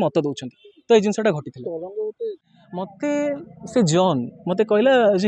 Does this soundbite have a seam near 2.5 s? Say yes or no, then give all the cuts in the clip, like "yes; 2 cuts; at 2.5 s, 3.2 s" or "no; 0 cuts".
yes; 1 cut; at 2.5 s